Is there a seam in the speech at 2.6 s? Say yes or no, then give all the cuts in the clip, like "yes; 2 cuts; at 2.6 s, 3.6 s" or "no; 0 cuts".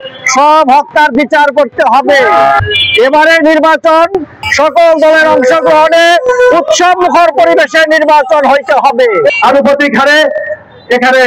yes; 3 cuts; at 2.6 s, 4.3 s, 9.3 s